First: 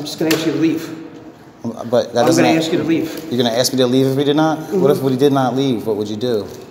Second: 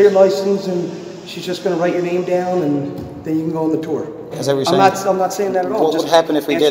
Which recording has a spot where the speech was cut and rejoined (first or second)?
second